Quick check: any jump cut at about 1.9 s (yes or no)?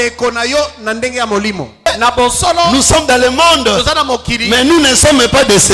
yes